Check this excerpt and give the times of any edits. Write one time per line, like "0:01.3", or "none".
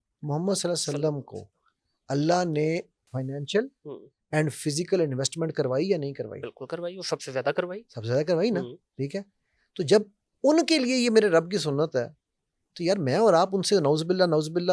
none